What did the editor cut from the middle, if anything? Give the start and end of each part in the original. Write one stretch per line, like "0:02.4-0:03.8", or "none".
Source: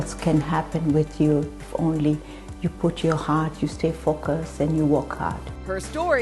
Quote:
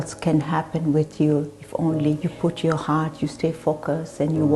0:02.3-0:02.7